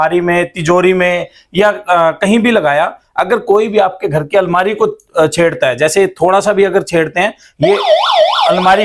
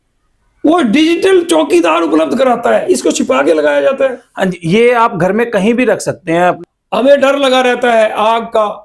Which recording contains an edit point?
second; 2 cuts; at 2.8 s, 6.6 s

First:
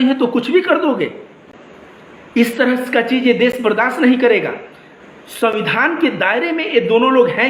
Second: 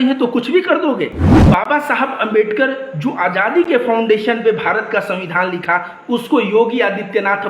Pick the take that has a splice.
second; 1 cut; at 1.3 s

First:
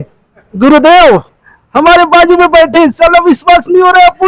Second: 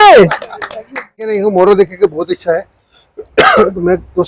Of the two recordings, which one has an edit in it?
second; 1 cut; at 1.4 s

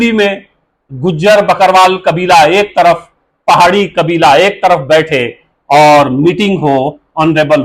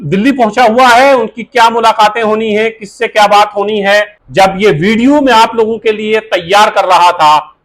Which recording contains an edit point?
second; 1 cut; at 4.2 s

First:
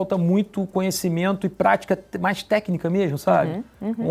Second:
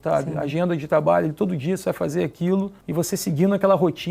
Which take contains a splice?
second; 1 cut; at 2.8 s

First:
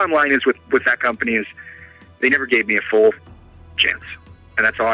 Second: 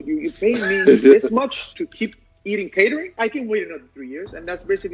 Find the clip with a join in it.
second; 2 cuts; at 1.7 s, 3.1 s

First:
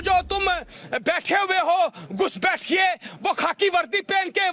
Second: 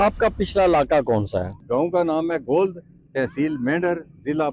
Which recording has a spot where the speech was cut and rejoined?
second; 1 cut; at 1.6 s

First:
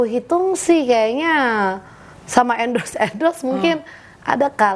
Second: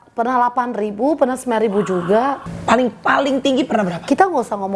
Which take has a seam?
second; 1 cut; at 2.4 s

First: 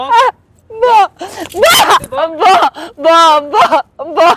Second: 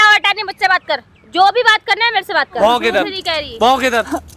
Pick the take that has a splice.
second; 1 cut; at 2.5 s

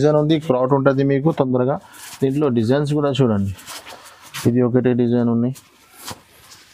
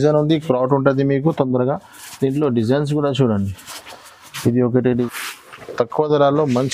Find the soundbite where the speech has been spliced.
second; 1 cut; at 5.1 s

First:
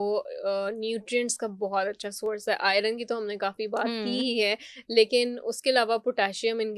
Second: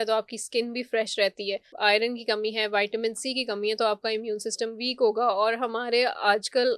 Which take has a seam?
second; 1 cut; at 1.7 s

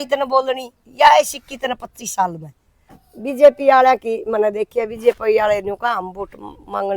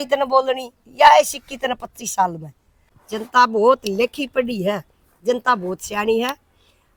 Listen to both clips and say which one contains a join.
first; 1 cut; at 3.1 s

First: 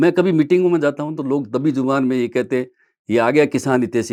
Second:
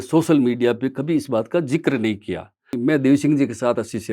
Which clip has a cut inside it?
second; 1 cut; at 2.8 s

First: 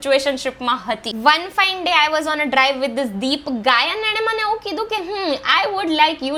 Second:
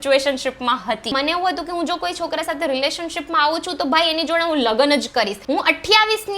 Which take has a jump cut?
second; 2 cuts; at 1.1 s, 5.4 s

